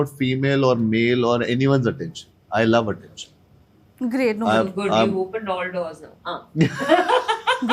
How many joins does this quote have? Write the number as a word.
zero